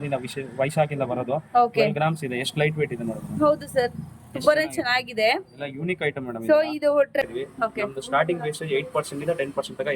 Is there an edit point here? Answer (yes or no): yes